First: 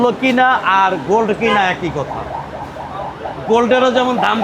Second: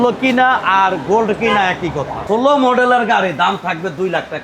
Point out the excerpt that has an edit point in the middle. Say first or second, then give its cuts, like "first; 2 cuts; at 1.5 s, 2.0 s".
second; 1 cut; at 2.1 s